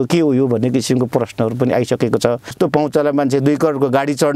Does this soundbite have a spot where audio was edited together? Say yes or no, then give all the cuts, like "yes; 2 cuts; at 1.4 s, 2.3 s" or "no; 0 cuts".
yes; 1 cut; at 2.5 s